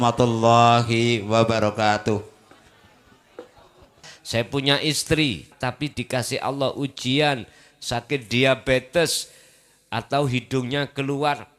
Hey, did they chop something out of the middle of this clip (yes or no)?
yes